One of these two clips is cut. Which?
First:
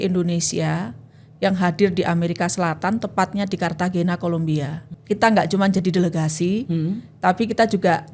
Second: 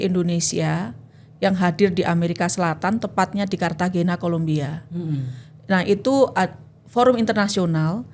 first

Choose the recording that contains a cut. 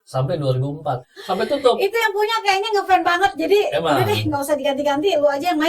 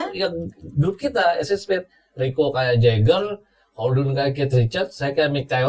first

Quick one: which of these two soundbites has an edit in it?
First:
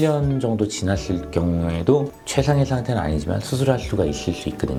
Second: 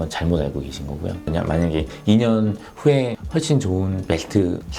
second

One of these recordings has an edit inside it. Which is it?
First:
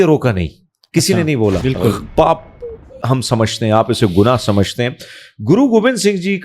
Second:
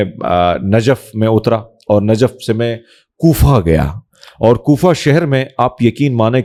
first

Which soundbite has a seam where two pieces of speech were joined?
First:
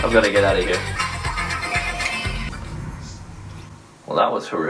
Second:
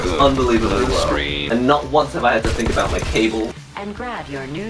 second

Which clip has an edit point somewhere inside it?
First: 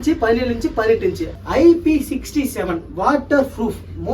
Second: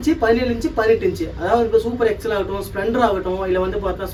first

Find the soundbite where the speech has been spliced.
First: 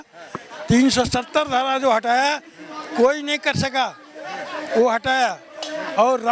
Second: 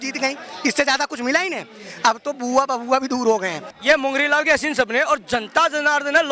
second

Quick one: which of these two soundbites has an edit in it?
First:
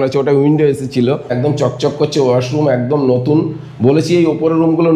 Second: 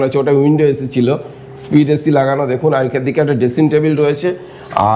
first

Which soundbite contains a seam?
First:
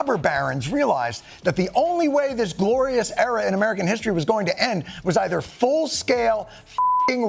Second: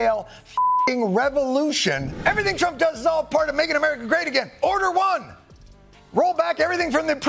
second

